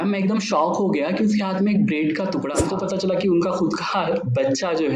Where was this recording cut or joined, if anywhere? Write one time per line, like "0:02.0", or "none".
0:02.6